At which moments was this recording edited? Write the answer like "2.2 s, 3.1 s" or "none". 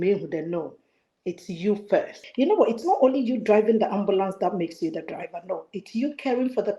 2.2 s